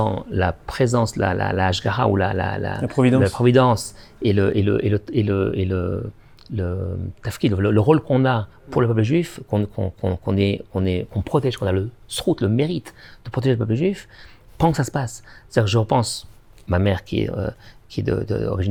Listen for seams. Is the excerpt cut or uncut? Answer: uncut